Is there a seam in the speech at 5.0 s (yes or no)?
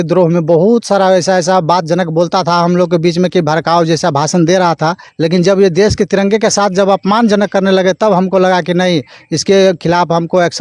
yes